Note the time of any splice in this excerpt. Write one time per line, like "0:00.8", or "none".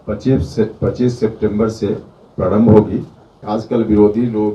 0:03.4